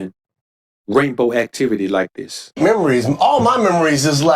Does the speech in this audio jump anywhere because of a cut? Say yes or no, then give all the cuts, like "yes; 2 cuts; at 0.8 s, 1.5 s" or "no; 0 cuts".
yes; 1 cut; at 2.6 s